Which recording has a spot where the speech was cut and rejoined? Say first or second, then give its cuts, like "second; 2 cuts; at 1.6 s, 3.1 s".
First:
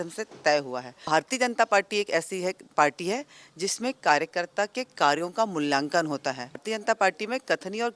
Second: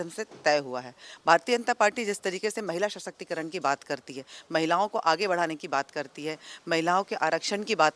first; 2 cuts; at 1.1 s, 6.6 s